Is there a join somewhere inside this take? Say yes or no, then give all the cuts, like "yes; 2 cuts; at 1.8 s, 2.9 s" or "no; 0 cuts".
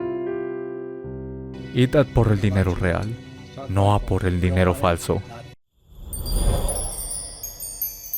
yes; 2 cuts; at 1.4 s, 5.7 s